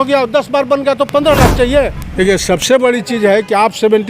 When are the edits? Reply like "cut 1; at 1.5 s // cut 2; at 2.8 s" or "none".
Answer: cut 1; at 2.0 s